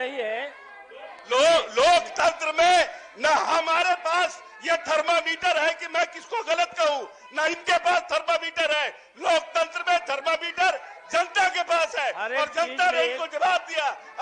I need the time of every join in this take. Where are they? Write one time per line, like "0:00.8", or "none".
none